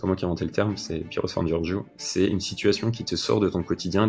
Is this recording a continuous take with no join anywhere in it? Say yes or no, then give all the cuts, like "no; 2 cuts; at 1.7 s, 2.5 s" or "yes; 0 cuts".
yes; 0 cuts